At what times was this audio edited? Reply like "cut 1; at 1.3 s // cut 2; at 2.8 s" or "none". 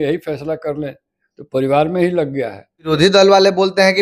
cut 1; at 2.9 s